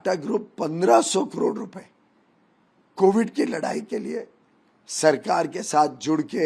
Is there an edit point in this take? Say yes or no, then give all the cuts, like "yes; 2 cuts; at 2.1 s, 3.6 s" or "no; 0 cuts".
no; 0 cuts